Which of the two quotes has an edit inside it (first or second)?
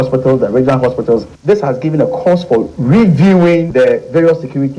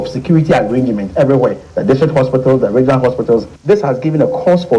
first